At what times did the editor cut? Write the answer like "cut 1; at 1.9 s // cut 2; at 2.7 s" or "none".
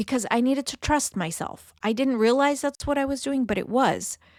none